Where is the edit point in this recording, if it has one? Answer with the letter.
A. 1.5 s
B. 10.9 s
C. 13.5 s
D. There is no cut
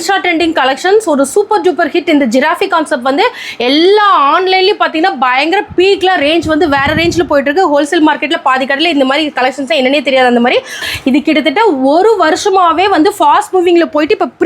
B